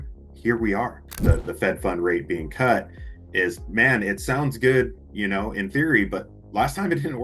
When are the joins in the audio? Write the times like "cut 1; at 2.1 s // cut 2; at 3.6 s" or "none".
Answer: cut 1; at 1.0 s